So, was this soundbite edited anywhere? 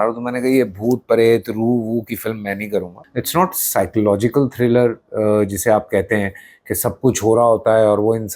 yes; 1 cut; at 3.0 s

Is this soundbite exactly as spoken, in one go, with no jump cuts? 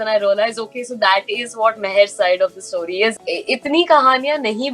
no; 1 cut; at 3.1 s

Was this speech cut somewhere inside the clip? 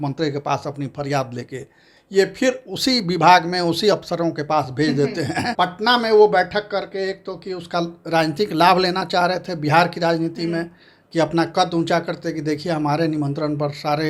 yes; 1 cut; at 5.5 s

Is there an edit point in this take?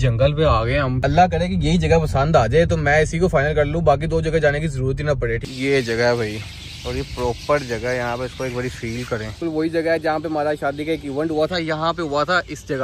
yes; 3 cuts; at 1.0 s, 5.5 s, 9.3 s

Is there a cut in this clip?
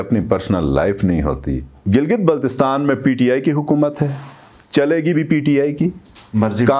yes; 1 cut; at 1.7 s

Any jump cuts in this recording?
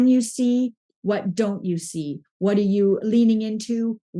yes; 1 cut; at 3.0 s

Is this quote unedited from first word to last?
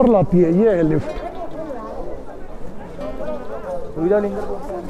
yes; 0 cuts

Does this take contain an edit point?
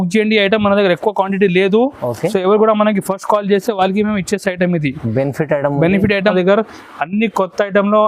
yes; 1 cut; at 6.3 s

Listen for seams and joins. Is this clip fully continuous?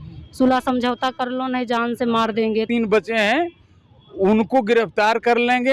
no; 1 cut; at 2.7 s

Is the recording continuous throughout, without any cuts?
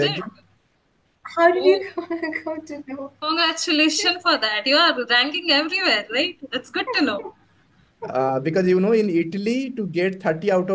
yes; 0 cuts

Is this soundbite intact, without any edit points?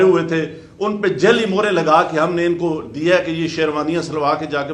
yes; 0 cuts

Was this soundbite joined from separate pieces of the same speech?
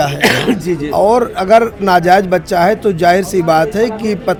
no; 0 cuts

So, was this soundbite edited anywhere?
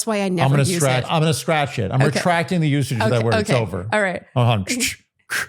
yes; 1 cut; at 1.1 s

